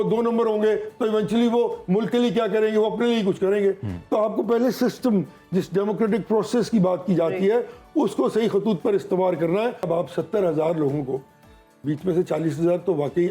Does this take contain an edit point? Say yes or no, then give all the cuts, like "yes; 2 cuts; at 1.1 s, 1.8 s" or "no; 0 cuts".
yes; 1 cut; at 9.9 s